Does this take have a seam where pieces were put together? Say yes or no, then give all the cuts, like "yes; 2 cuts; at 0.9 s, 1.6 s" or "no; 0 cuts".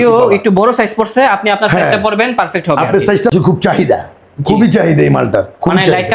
yes; 1 cut; at 3.3 s